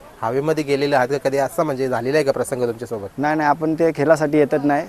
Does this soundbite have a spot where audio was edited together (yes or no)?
no